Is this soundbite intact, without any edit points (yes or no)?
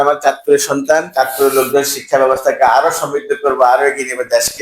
no